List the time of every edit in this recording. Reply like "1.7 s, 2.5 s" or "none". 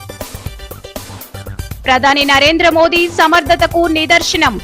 1.3 s

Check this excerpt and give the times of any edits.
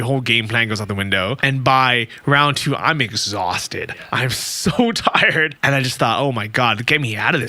1.4 s, 5.5 s

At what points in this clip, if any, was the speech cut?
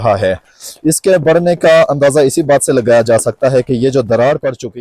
none

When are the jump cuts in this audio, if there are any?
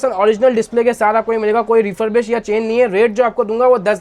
none

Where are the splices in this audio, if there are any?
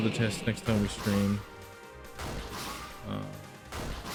none

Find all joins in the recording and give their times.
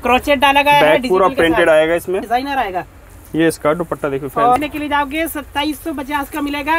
2.3 s, 4.6 s

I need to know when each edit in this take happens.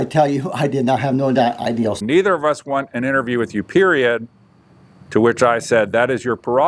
2.0 s

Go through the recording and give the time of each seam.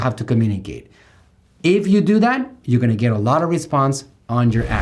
none

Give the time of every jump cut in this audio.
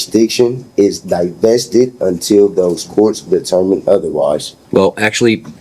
4.6 s

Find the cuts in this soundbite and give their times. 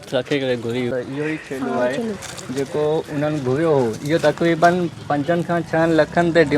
0.9 s

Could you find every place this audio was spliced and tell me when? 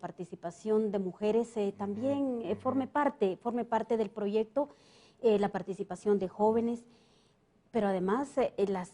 5.3 s

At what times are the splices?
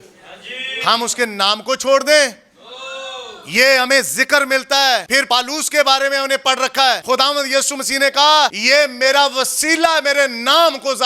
5.1 s, 7.0 s, 8.6 s

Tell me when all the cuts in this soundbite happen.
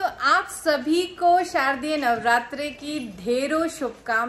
none

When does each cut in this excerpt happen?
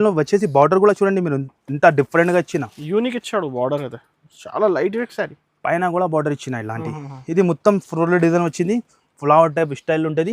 none

